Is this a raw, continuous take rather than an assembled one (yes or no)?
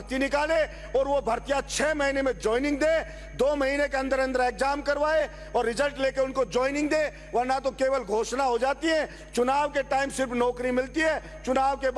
yes